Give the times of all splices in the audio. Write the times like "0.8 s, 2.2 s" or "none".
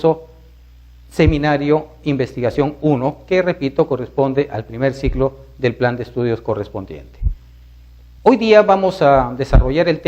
8.4 s

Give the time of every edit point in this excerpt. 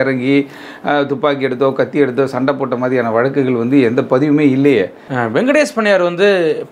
5.0 s

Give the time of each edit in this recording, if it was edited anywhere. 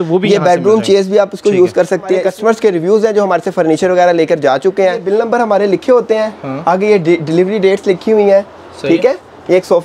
2.3 s, 5.1 s

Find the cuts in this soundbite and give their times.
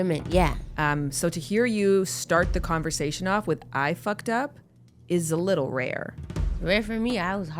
6.6 s

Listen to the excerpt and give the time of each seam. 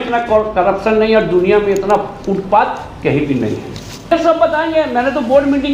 4.1 s

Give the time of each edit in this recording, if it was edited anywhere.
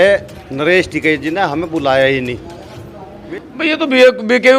3.1 s

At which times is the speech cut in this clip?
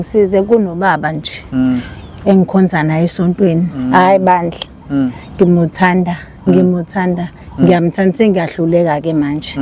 none

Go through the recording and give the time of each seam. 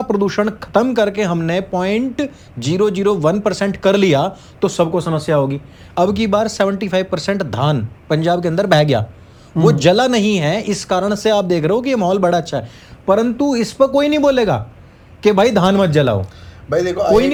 none

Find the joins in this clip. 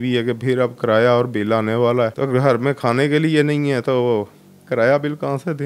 2.2 s

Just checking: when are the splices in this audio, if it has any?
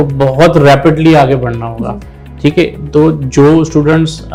none

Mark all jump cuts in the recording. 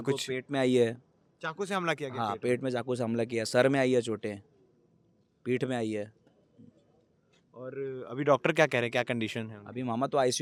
none

